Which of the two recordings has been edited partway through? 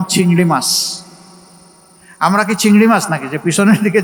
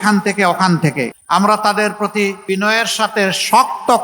second; 2 cuts; at 1.2 s, 2.4 s

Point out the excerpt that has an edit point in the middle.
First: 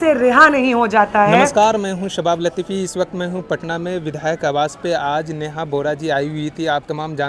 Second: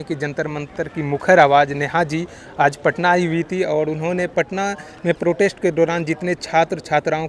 first; 1 cut; at 1.5 s

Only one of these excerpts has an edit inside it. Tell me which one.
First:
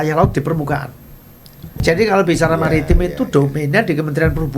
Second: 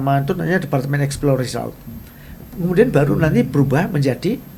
first; 1 cut; at 1.7 s

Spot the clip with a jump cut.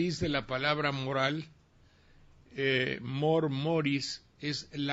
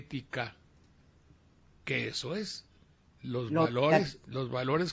first; 1 cut; at 2.4 s

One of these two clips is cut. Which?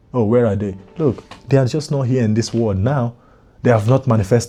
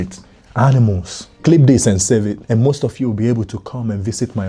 second; 2 cuts; at 1.2 s, 2.4 s

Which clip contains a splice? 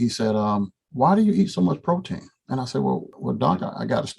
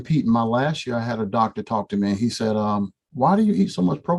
first; 1 cut; at 3.1 s

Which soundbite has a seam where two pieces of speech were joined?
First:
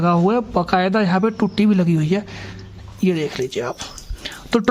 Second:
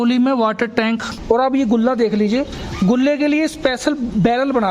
second; 1 cut; at 1.1 s

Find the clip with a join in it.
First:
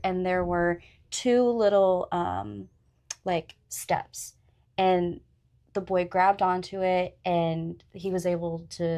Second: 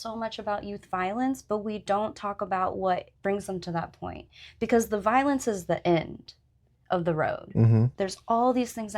second; 2 cuts; at 3.1 s, 7.9 s

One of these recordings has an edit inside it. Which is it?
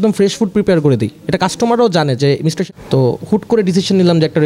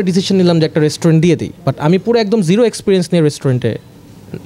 first; 1 cut; at 2.6 s

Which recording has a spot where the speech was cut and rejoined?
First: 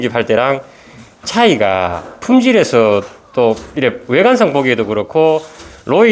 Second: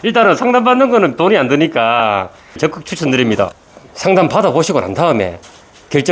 second; 2 cuts; at 2.5 s, 3.6 s

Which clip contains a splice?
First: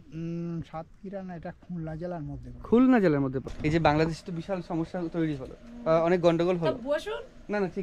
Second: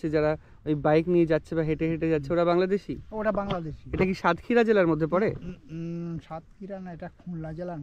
first; 1 cut; at 3.5 s

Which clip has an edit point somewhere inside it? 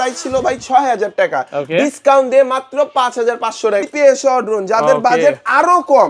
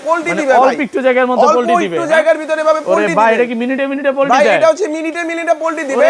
first; 1 cut; at 3.8 s

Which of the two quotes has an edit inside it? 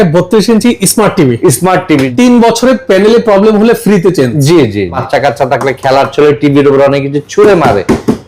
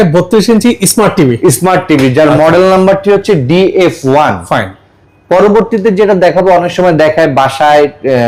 first; 2 cuts; at 2.1 s, 5.0 s

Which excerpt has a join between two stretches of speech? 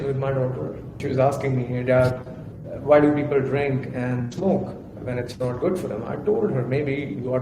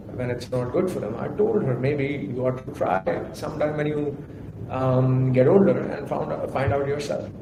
first; 1 cut; at 0.9 s

